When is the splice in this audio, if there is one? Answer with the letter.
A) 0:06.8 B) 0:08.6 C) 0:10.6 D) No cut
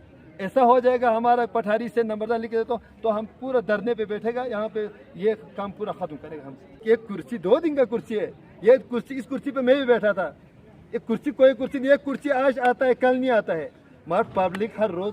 A